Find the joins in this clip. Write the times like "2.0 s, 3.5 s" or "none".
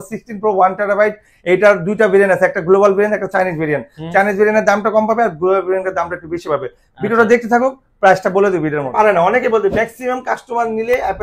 8.9 s